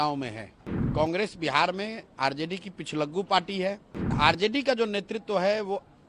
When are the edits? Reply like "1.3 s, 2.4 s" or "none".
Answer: 0.9 s, 4.1 s